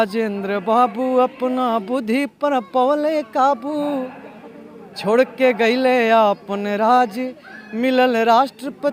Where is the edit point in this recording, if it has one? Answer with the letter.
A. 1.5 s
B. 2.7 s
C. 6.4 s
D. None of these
D